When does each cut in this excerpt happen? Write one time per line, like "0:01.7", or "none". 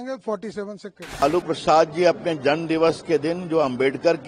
0:01.0